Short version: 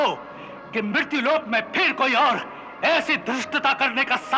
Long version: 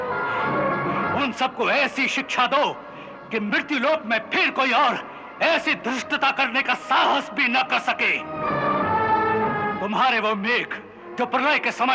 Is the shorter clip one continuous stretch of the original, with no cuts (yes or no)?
yes